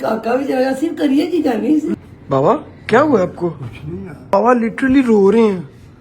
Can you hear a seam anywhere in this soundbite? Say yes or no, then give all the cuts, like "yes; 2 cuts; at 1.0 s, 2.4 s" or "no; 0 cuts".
yes; 2 cuts; at 1.9 s, 4.3 s